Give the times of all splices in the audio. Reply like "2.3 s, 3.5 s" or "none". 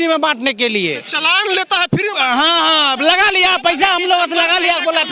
none